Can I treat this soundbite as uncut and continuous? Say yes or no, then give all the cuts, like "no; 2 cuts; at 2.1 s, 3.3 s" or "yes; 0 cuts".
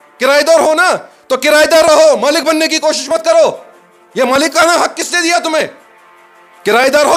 yes; 0 cuts